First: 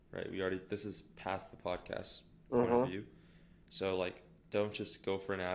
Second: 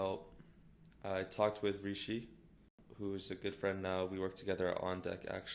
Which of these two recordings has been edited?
second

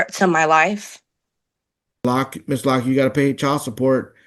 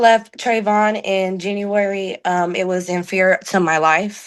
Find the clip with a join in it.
first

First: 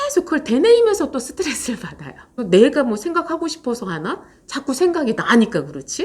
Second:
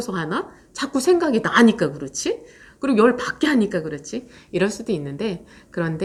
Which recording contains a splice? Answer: first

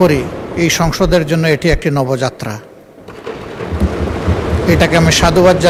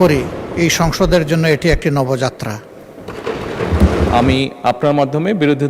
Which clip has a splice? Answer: second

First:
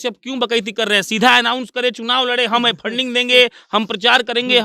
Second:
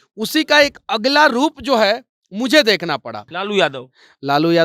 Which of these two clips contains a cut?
second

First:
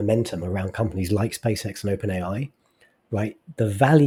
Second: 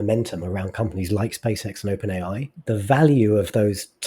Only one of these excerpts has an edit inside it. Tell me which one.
second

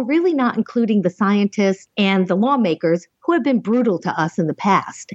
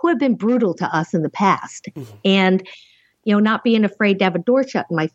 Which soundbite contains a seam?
first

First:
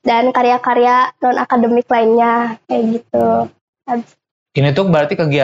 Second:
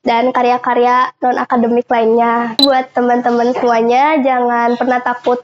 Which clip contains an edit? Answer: second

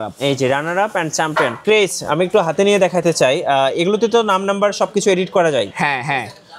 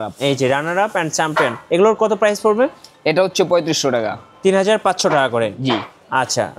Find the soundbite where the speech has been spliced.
first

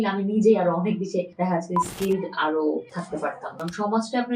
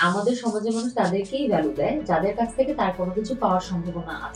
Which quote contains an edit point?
first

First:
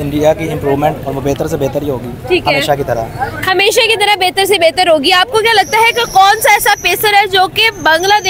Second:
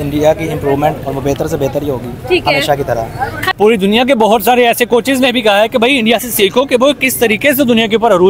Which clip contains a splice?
second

